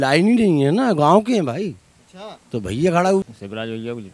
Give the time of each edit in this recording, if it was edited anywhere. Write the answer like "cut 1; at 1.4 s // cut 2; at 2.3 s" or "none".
cut 1; at 3.2 s

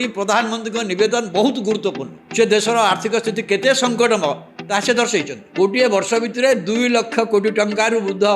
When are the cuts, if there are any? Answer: cut 1; at 1.7 s

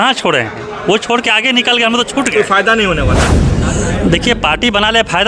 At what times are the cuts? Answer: cut 1; at 2.3 s

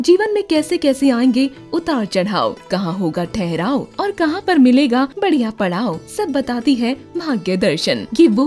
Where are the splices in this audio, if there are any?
none

